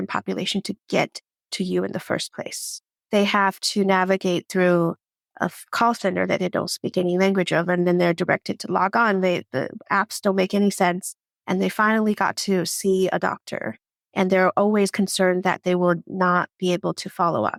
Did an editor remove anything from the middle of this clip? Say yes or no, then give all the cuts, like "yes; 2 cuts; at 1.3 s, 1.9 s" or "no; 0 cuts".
no; 0 cuts